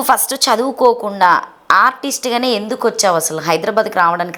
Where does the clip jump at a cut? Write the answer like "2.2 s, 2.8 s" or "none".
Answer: none